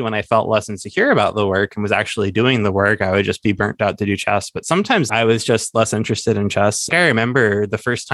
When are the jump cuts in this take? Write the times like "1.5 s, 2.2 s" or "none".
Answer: 5.1 s, 6.9 s